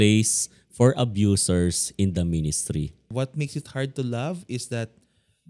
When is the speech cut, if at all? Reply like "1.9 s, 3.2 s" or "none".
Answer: 3.1 s